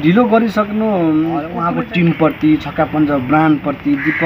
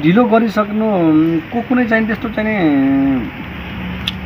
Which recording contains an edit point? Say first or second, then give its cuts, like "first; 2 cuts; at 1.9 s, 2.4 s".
first; 1 cut; at 1.6 s